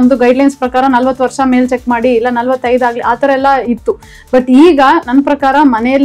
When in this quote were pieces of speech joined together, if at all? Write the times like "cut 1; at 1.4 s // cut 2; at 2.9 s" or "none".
none

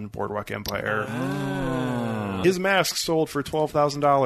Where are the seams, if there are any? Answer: cut 1; at 2.3 s

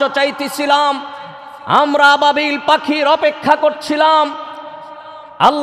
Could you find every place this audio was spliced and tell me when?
none

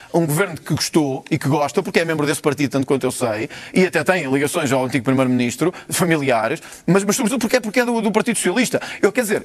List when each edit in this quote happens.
none

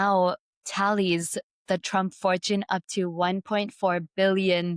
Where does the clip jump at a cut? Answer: none

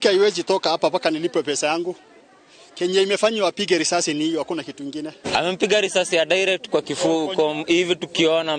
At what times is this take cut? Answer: cut 1; at 5.2 s

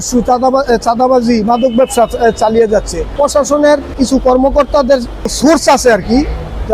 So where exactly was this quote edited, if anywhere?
cut 1; at 3.1 s // cut 2; at 3.9 s // cut 3; at 5.3 s

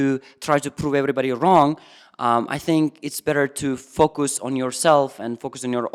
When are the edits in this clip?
none

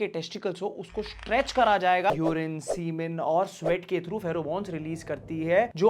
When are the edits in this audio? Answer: cut 1; at 2.1 s

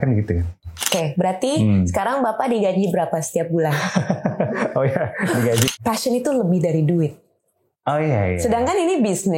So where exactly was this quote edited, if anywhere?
cut 1; at 0.9 s // cut 2; at 5.7 s

